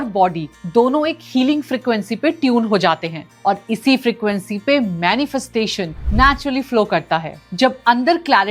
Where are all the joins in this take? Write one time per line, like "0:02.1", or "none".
0:07.4